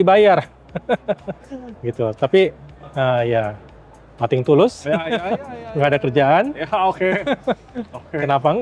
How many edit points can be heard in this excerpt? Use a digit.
0